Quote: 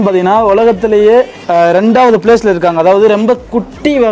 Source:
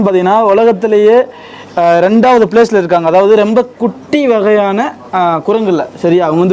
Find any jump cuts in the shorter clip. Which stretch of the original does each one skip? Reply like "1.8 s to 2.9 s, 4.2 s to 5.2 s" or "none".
1.4 s to 1.7 s